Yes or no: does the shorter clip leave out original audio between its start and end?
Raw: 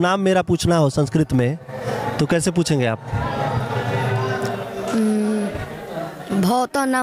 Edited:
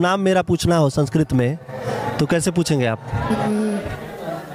yes